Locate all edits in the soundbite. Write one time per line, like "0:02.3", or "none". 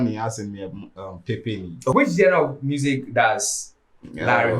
0:01.9